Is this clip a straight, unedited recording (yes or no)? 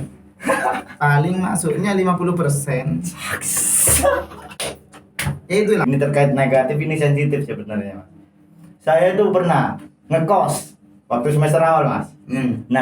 no